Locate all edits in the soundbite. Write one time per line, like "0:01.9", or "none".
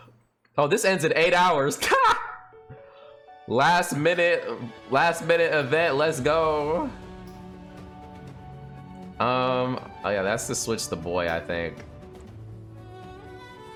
none